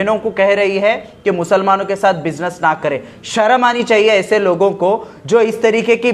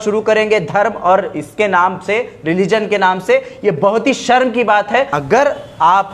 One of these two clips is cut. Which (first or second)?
second